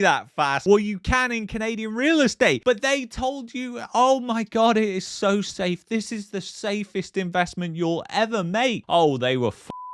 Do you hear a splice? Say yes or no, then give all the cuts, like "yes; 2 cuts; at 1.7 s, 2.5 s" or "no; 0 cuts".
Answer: yes; 1 cut; at 8.8 s